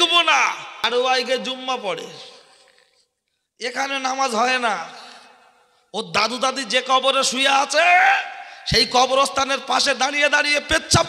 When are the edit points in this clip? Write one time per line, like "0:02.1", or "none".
0:00.9